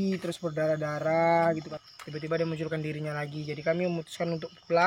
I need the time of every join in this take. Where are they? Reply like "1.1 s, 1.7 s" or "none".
1.7 s